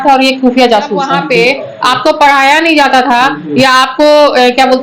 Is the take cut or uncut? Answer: cut